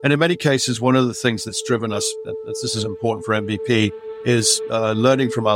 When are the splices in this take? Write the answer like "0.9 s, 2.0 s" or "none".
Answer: none